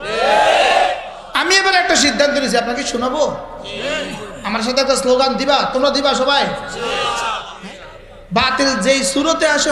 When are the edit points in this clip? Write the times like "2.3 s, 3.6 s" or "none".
1.2 s, 7.5 s